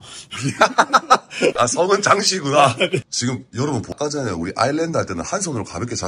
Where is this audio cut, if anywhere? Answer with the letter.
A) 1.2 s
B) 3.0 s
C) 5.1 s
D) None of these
B